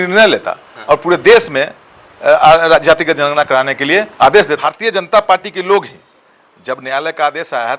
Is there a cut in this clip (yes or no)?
yes